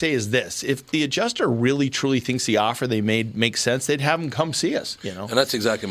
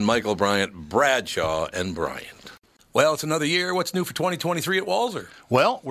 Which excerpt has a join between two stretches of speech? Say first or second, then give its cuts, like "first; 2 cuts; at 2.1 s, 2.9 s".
second; 1 cut; at 2.6 s